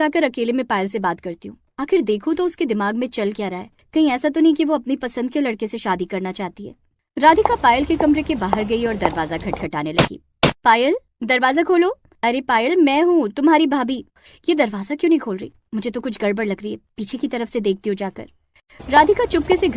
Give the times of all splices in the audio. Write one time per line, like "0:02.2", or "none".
none